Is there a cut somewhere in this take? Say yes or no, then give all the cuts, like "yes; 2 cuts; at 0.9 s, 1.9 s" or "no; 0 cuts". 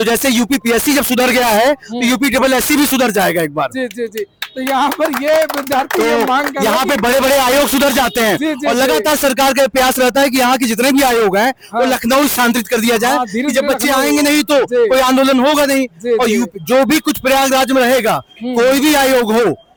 no; 0 cuts